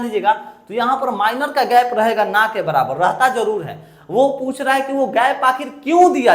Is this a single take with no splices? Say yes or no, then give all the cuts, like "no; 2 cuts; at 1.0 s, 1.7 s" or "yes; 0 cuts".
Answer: yes; 0 cuts